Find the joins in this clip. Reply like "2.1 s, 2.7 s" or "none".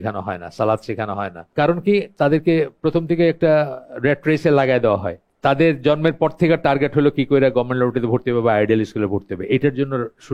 1.4 s, 5.3 s

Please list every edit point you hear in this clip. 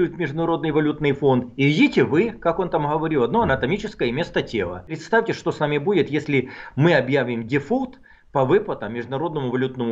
5.0 s

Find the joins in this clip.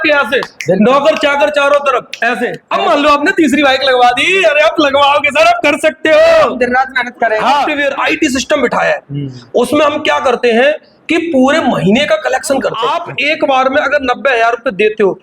2.6 s, 7.7 s, 13.1 s

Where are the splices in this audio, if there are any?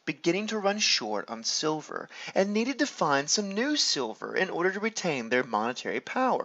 2.7 s

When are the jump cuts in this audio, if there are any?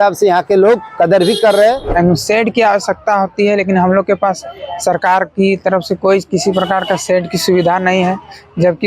1.8 s

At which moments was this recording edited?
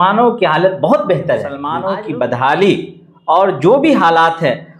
1.6 s

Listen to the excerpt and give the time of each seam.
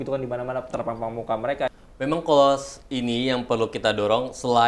1.7 s

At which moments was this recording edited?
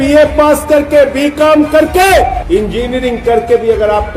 2.4 s

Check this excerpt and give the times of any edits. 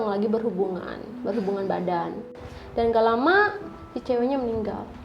2.2 s

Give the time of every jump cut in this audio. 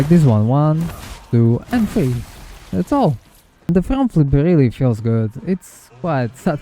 3.7 s

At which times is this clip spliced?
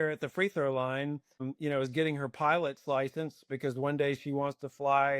1.5 s

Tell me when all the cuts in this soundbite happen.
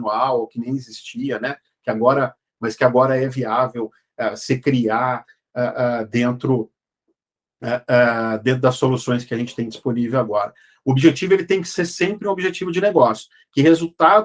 none

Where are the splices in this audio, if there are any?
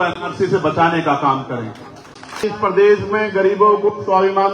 2.4 s

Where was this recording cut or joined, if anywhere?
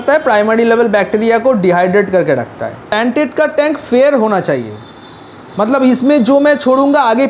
2.8 s

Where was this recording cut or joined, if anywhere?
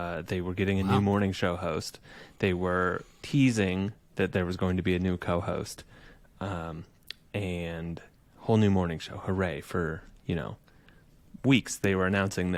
none

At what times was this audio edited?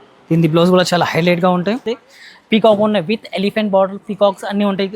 1.8 s

